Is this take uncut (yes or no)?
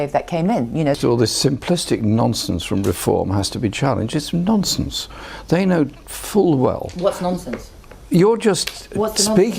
no